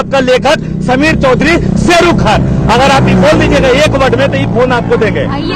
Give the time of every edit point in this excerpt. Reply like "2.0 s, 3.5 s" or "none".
none